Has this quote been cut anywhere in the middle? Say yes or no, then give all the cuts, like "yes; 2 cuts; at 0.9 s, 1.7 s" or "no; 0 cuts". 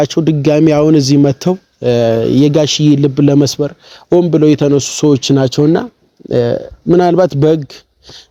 no; 0 cuts